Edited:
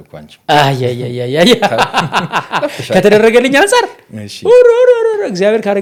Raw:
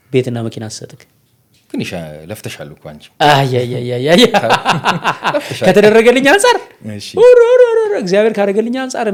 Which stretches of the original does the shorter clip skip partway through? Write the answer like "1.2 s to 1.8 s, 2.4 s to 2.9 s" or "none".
none

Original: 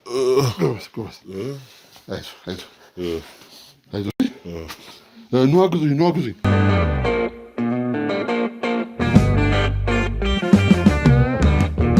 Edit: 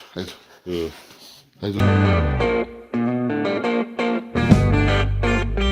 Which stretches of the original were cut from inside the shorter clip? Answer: 4.1 s to 6.4 s

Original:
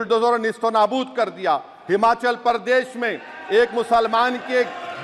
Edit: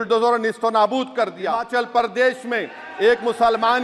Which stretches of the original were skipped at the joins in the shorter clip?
1.7 s to 2.2 s

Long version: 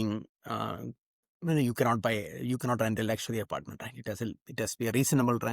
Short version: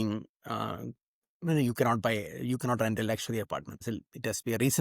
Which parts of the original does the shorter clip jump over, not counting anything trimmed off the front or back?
3.8 s to 4.2 s

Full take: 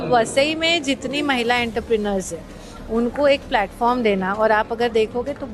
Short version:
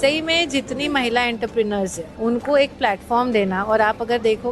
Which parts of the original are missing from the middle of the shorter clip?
2.4 s to 2.7 s

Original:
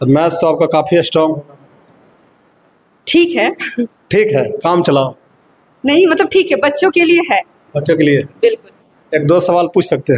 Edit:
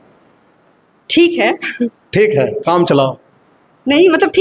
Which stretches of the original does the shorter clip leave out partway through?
none

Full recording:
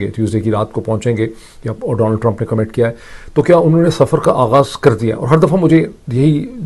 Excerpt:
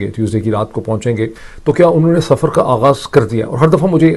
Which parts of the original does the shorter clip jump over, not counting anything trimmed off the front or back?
1.5 s to 3.1 s

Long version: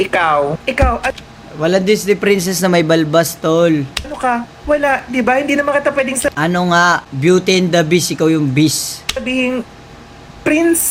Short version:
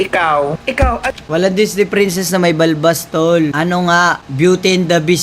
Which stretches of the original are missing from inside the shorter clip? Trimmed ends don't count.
1.2 s to 1.5 s, 3.8 s to 6.4 s

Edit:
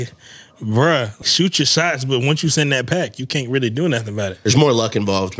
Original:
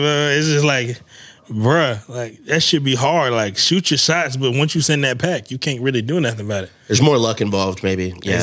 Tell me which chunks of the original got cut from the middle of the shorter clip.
2.1 s to 3.6 s, 6.7 s to 6.8 s

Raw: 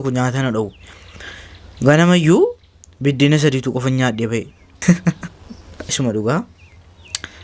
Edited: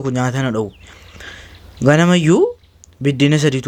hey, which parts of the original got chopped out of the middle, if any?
none

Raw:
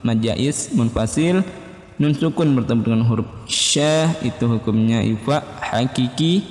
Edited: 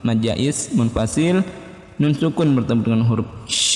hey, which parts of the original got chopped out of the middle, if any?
none

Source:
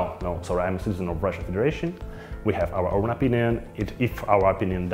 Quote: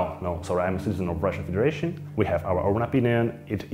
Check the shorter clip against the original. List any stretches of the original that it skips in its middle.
2.0 s to 2.3 s

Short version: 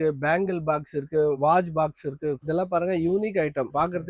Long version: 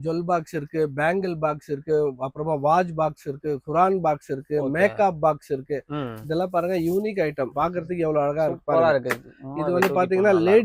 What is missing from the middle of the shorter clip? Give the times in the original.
2.1 s to 2.6 s, 3.6 s to 6.2 s

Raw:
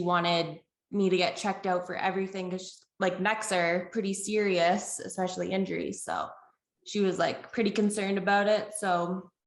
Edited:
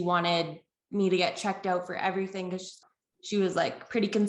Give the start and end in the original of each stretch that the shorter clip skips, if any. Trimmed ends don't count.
2.8 s to 6.4 s

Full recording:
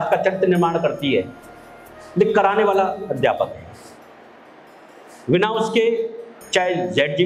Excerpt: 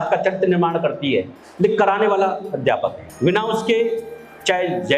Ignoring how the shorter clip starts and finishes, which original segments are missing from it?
1.4 s to 2.0 s, 3.6 s to 5.1 s

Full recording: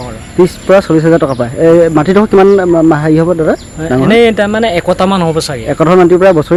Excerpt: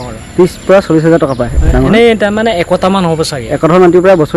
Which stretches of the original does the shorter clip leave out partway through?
1.5 s to 3.7 s

